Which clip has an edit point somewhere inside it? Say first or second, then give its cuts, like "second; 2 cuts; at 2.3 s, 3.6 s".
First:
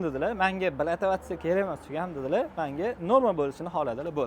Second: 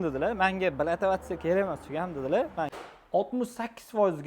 second; 1 cut; at 2.7 s